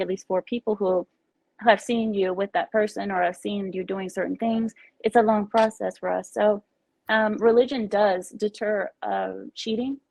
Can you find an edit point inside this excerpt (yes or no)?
no